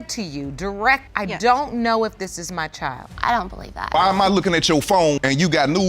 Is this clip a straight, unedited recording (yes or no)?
no